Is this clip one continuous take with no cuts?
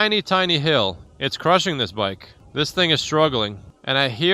no; 2 cuts; at 1.1 s, 2.4 s

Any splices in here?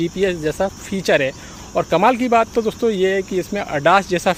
no; 0 cuts

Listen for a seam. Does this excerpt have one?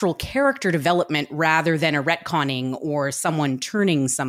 no; 0 cuts

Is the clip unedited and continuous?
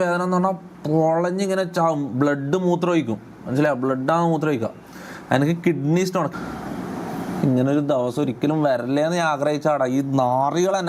no; 1 cut; at 6.3 s

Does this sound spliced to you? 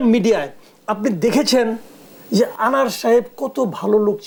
no; 0 cuts

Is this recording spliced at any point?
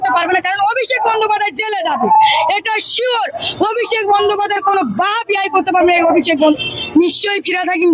yes; 1 cut; at 6.5 s

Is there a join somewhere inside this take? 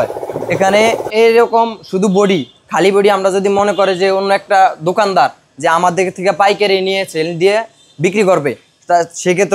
yes; 1 cut; at 1.1 s

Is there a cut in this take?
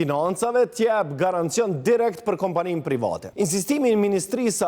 yes; 1 cut; at 3.3 s

